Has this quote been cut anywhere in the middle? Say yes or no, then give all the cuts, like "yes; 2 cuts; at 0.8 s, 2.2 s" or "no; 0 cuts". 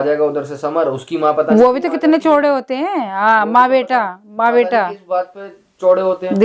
no; 0 cuts